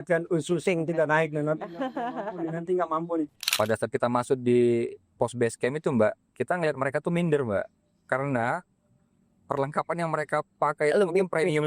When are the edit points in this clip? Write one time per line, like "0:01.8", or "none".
0:03.4